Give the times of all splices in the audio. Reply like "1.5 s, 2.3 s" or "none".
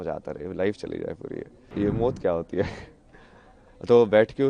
1.7 s